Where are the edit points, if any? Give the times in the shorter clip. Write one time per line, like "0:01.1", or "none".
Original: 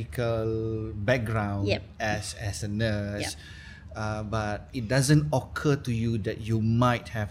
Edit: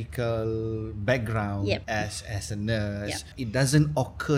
0:01.8
0:03.3